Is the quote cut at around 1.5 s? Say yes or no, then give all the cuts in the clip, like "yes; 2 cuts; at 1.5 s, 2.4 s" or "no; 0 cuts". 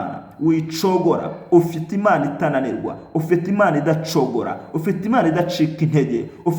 no; 0 cuts